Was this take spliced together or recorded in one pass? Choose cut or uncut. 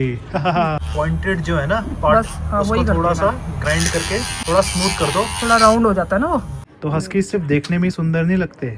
cut